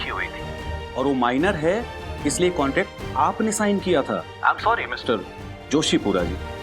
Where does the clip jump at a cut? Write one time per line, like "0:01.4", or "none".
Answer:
0:04.3